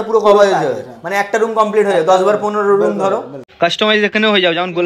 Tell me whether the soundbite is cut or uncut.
cut